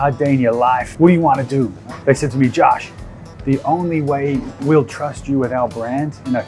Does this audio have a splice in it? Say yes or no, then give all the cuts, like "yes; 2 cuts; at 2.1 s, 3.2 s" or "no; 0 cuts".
yes; 2 cuts; at 0.9 s, 1.8 s